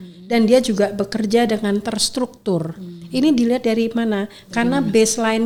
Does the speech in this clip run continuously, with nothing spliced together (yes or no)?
yes